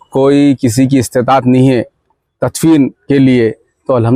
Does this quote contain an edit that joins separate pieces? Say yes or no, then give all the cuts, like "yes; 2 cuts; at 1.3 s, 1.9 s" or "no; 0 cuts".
no; 0 cuts